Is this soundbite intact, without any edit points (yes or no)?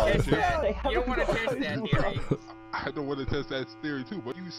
yes